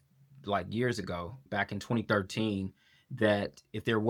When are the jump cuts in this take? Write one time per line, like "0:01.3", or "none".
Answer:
none